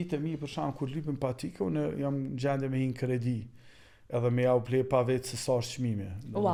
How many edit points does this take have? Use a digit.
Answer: 0